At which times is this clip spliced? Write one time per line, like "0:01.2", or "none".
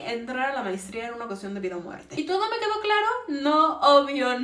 0:02.1